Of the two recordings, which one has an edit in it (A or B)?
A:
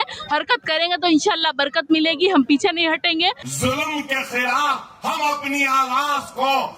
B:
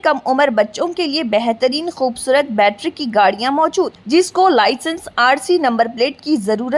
A